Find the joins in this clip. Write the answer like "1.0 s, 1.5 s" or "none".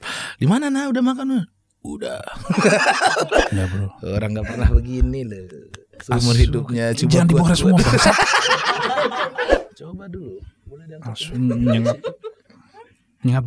3.4 s, 9.7 s